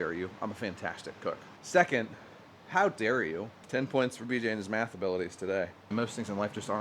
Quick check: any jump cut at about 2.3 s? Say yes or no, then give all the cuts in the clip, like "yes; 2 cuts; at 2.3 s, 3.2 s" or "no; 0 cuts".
no; 2 cuts; at 3.6 s, 5.9 s